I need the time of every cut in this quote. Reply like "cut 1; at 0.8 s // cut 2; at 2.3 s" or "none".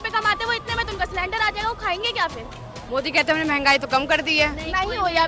none